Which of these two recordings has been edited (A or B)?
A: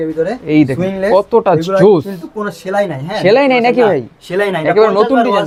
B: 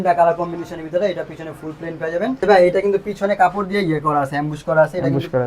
B